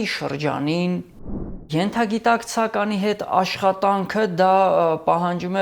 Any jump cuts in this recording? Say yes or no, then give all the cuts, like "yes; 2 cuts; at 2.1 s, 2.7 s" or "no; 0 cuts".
yes; 1 cut; at 1.7 s